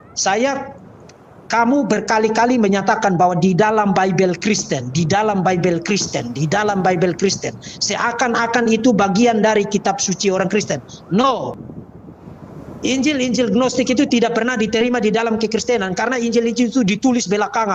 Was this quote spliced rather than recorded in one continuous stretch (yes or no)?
yes